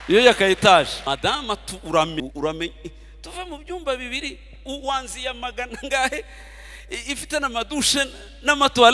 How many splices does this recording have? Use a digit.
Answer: 2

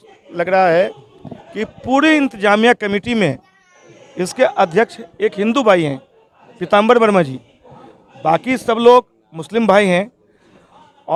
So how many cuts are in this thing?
0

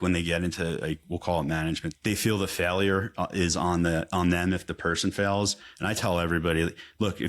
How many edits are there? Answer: 1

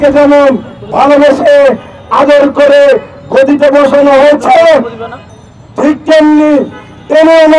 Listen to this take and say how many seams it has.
0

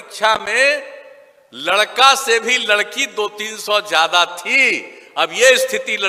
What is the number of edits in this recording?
0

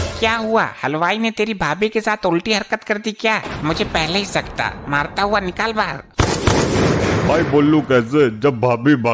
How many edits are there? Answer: 1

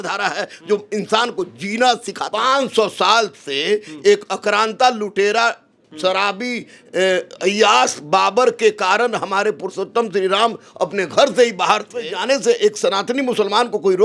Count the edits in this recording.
2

